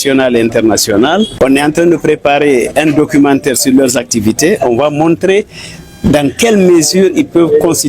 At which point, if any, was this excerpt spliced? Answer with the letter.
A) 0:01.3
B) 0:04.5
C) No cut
A